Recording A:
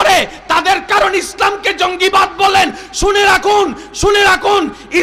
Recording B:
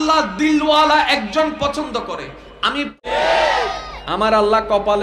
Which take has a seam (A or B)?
B